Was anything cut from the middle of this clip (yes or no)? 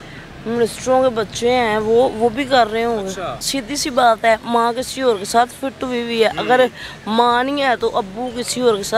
yes